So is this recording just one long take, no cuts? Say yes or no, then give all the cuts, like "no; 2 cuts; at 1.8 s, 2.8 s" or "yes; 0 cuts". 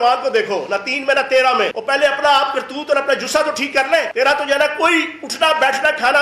no; 2 cuts; at 1.8 s, 4.1 s